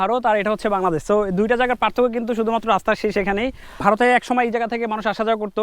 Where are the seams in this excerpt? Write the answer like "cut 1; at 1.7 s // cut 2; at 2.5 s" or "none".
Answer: cut 1; at 3.7 s